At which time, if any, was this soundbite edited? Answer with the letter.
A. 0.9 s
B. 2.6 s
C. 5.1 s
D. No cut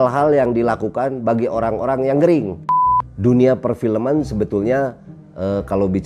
B